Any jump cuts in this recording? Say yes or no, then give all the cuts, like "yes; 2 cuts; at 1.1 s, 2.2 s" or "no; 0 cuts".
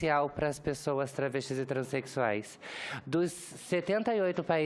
no; 0 cuts